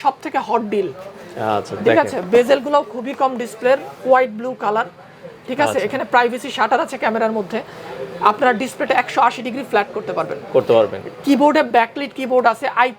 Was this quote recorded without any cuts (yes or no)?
yes